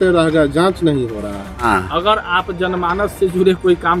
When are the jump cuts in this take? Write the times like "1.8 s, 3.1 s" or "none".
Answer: 1.6 s